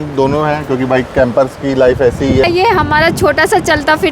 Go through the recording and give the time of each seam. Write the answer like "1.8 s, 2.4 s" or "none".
2.4 s